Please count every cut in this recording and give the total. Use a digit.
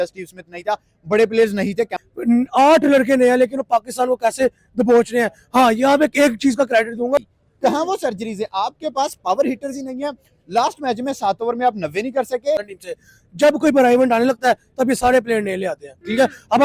3